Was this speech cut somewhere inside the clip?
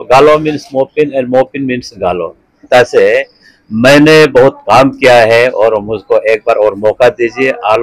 yes; 1 cut; at 2.6 s

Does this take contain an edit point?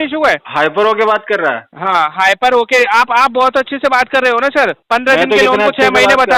no; 0 cuts

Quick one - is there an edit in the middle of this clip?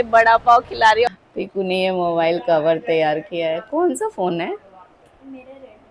yes; 1 cut; at 1.1 s

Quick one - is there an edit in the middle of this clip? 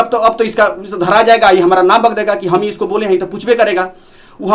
no; 0 cuts

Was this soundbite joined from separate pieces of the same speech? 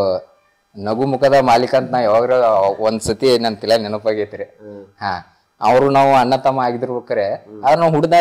no; 0 cuts

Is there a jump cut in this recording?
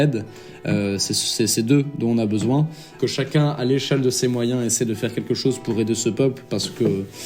yes; 1 cut; at 2.8 s

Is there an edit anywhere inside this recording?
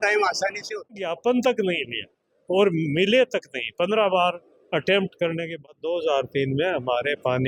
yes; 2 cuts; at 1.2 s, 5.5 s

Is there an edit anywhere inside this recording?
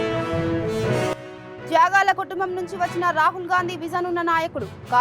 yes; 1 cut; at 1.0 s

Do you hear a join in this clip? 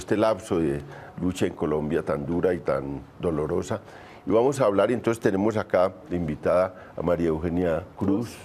no; 0 cuts

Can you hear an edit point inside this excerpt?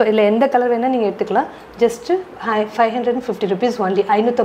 no; 0 cuts

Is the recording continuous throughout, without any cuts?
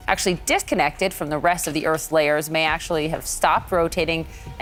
yes; 0 cuts

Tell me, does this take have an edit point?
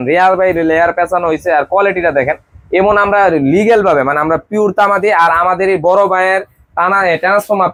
no; 0 cuts

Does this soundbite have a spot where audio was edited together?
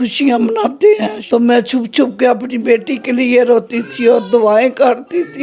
yes; 1 cut; at 1.1 s

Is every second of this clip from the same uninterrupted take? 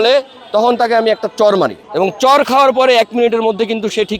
no; 1 cut; at 1.8 s

